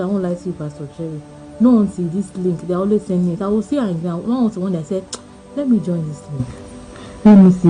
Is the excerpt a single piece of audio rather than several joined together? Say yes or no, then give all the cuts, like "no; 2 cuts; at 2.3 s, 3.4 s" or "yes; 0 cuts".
yes; 0 cuts